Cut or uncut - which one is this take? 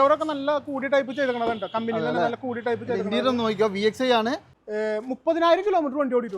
cut